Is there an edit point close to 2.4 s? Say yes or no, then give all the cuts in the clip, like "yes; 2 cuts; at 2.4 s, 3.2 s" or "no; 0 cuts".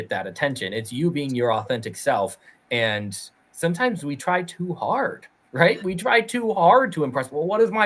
no; 0 cuts